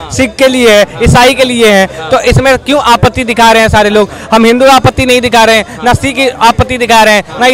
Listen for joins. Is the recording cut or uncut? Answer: uncut